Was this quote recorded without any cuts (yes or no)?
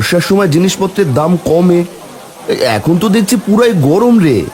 yes